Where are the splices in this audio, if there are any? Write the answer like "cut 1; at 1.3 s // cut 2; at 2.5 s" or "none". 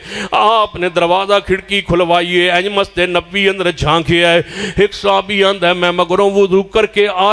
none